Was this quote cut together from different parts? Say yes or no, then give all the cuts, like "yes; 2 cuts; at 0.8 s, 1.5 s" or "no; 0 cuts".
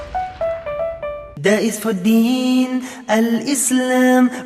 yes; 1 cut; at 1.3 s